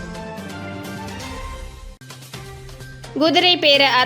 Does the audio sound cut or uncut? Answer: cut